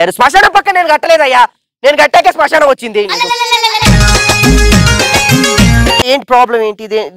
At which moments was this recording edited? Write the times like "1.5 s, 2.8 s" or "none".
6.0 s